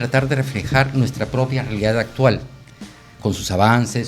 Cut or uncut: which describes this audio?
uncut